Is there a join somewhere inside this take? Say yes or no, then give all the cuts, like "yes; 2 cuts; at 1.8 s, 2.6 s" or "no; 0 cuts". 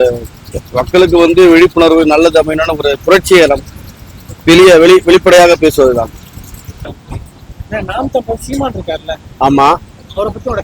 yes; 1 cut; at 6.7 s